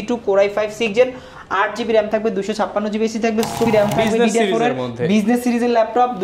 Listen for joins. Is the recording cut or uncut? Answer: cut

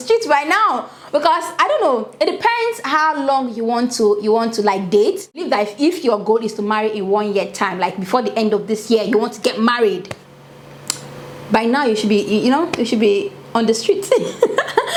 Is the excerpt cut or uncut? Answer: uncut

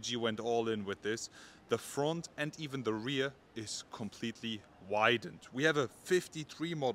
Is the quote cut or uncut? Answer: uncut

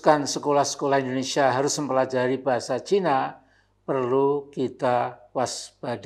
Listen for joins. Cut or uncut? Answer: uncut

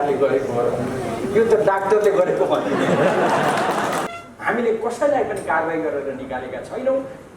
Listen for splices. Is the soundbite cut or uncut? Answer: cut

